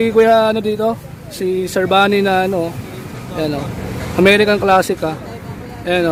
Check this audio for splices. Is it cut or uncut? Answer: uncut